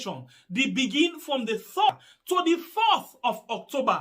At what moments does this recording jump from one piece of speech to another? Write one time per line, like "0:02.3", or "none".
0:01.9